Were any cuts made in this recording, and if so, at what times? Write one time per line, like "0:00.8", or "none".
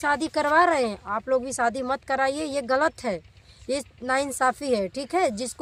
none